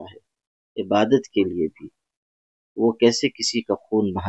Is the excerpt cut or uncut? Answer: uncut